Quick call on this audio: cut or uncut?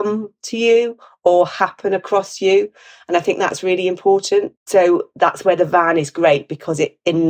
uncut